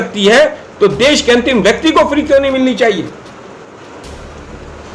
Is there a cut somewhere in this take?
yes; 1 cut; at 3.8 s

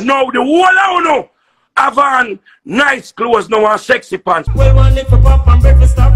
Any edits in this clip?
yes; 1 cut; at 4.4 s

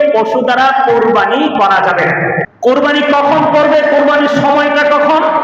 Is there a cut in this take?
yes; 1 cut; at 2.5 s

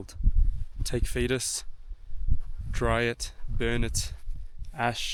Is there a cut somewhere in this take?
no; 0 cuts

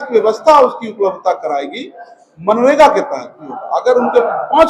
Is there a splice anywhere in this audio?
yes; 1 cut; at 3.5 s

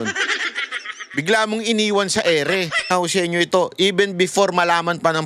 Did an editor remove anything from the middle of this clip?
yes; 1 cut; at 2.9 s

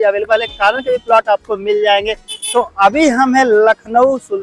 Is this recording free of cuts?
yes; 0 cuts

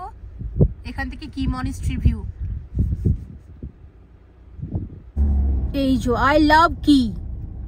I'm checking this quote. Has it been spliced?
no; 0 cuts

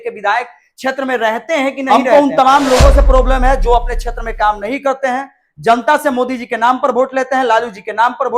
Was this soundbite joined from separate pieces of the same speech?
yes; 1 cut; at 1.9 s

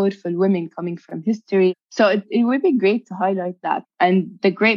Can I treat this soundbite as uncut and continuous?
no; 2 cuts; at 1.8 s, 3.8 s

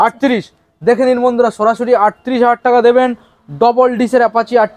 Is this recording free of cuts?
yes; 0 cuts

